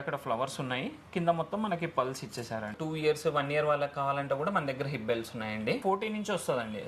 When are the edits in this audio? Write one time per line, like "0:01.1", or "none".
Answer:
0:02.8
0:05.8